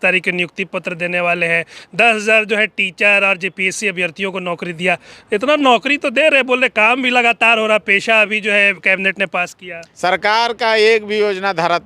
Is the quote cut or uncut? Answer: cut